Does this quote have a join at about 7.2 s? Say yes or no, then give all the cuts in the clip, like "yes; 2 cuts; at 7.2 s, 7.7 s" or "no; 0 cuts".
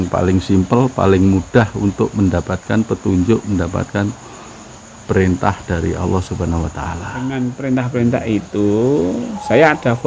yes; 1 cut; at 7.2 s